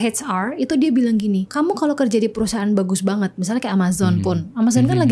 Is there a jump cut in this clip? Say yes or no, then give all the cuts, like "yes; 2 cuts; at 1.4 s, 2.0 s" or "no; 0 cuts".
yes; 1 cut; at 1.5 s